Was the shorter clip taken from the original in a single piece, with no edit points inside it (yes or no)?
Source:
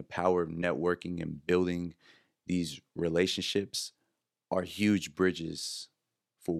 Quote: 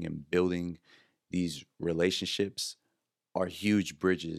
yes